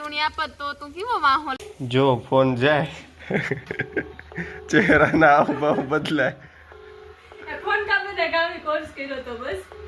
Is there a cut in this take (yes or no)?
yes